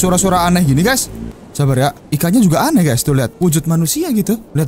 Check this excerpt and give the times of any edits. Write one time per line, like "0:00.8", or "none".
none